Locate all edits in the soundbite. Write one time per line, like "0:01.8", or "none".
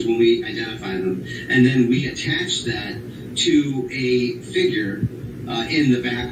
none